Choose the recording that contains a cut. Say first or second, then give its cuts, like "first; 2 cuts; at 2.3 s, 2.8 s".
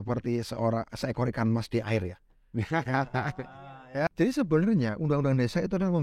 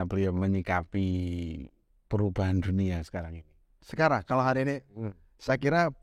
first; 1 cut; at 4.1 s